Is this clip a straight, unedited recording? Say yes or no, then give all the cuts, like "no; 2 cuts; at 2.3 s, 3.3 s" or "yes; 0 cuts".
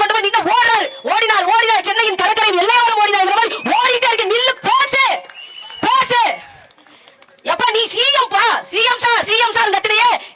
yes; 0 cuts